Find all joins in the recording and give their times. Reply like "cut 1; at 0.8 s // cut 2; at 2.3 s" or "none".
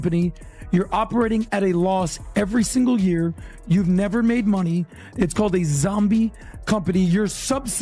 none